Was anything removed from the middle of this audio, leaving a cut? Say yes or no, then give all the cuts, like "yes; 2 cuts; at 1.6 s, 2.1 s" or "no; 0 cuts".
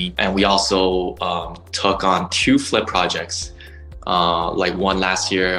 no; 0 cuts